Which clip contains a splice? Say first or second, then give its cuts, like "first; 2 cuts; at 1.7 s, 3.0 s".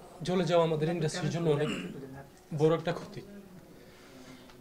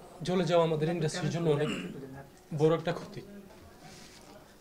second; 1 cut; at 3.5 s